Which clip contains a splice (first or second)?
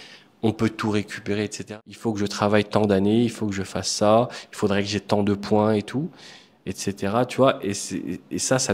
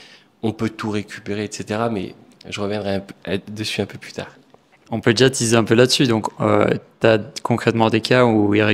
first